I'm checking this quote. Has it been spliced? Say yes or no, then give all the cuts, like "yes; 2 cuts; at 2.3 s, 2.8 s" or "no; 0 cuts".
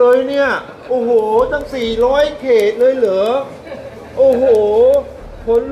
no; 0 cuts